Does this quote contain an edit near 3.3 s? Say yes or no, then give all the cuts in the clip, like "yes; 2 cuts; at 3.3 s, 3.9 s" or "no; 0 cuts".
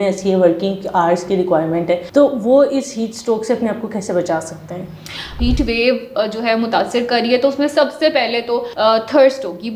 no; 3 cuts; at 2.0 s, 5.3 s, 8.7 s